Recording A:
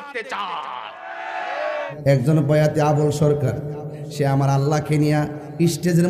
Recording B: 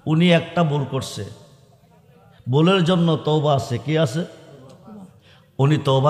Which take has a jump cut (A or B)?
A